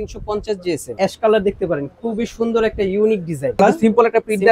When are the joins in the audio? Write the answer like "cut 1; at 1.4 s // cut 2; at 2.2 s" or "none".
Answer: cut 1; at 1.0 s // cut 2; at 3.6 s